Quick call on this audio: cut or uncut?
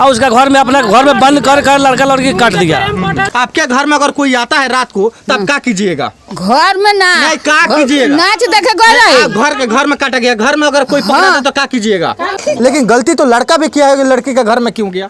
cut